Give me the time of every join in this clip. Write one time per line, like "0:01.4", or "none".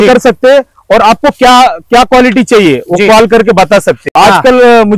0:04.0